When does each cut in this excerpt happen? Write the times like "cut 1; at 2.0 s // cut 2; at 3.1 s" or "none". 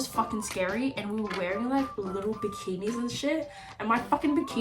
none